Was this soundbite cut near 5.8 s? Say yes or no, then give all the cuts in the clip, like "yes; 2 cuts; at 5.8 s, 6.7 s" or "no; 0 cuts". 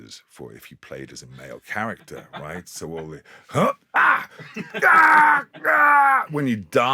no; 0 cuts